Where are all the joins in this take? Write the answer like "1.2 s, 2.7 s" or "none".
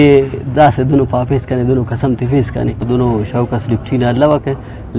2.9 s